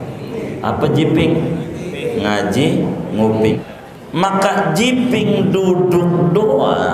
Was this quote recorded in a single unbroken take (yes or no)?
no